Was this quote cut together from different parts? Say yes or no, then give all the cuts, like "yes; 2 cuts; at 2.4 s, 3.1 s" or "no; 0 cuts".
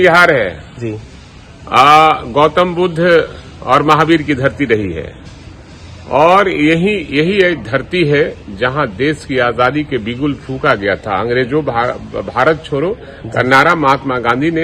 no; 0 cuts